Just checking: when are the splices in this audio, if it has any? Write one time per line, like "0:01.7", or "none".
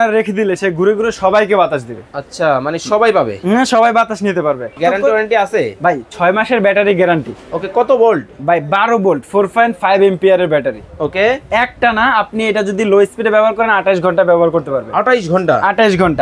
0:04.8